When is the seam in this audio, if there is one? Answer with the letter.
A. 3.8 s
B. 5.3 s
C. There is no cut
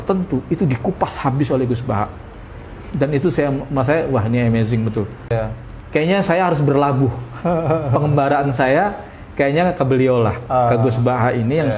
B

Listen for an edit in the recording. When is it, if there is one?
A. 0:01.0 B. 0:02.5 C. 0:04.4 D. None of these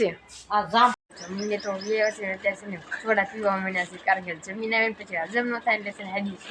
A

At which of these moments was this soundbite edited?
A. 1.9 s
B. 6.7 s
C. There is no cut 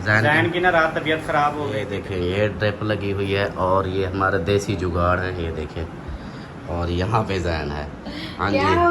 A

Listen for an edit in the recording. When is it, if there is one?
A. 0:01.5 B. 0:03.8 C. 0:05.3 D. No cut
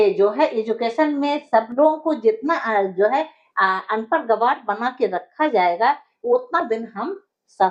D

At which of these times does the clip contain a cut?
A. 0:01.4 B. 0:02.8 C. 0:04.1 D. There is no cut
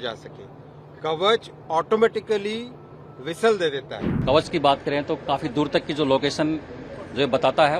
C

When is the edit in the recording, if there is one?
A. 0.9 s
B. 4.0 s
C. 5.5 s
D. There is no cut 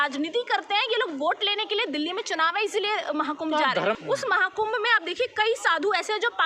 B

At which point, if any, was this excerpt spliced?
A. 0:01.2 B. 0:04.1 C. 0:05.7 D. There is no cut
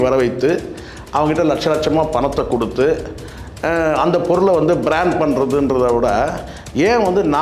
D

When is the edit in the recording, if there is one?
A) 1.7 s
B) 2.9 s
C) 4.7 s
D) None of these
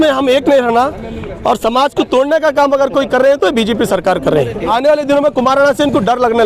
C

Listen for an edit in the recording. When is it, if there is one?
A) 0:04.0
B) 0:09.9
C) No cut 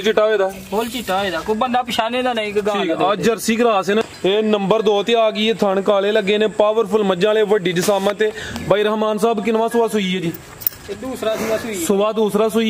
A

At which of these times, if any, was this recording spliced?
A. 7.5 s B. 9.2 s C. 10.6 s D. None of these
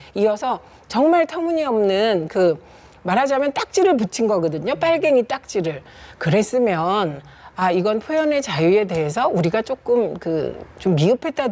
D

